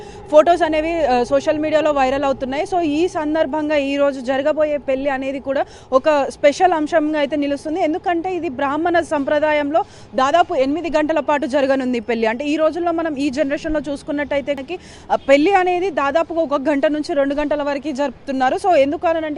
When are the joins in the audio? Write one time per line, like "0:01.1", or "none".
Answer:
0:14.6